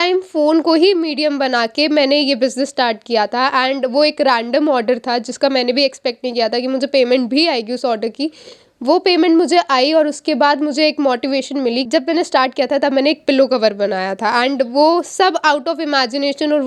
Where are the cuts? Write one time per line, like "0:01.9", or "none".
0:11.9